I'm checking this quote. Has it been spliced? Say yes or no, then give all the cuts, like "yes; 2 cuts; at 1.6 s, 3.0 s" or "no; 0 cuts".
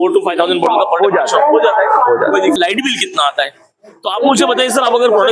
yes; 1 cut; at 2.6 s